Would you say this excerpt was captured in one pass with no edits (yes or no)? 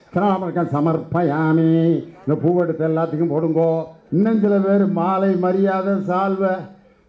no